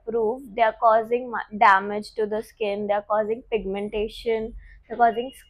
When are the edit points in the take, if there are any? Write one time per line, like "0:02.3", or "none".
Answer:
none